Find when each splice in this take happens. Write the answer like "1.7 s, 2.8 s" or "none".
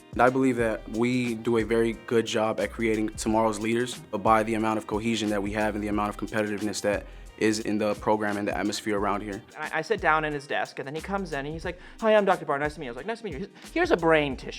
4.2 s, 7.6 s, 9.6 s